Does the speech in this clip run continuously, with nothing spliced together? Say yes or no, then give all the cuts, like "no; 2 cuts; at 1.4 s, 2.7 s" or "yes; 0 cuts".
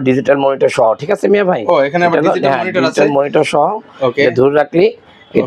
yes; 0 cuts